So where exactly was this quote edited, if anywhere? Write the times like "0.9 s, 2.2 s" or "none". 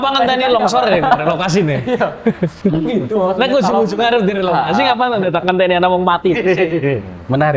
2.6 s